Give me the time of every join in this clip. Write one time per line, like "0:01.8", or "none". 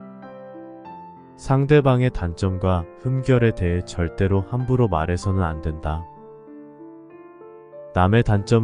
0:01.0